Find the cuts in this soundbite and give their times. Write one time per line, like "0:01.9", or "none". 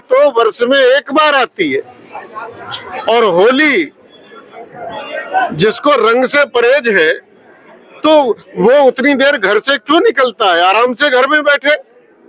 none